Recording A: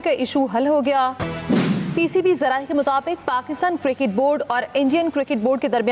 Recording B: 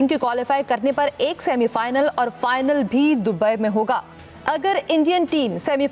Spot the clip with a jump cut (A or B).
A